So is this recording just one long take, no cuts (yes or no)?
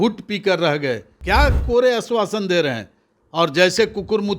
no